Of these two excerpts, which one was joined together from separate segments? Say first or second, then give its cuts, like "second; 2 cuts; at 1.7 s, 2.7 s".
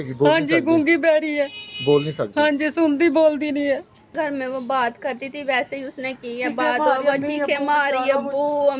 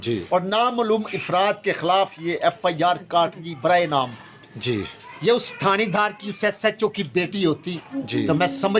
first; 1 cut; at 4.1 s